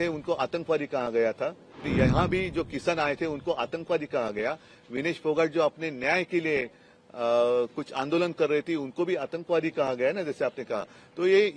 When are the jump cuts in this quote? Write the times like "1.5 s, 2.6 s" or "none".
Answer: 1.9 s